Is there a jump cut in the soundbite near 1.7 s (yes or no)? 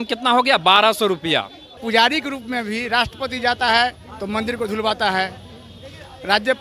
yes